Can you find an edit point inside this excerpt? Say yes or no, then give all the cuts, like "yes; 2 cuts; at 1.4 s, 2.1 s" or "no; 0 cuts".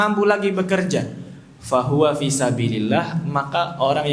no; 0 cuts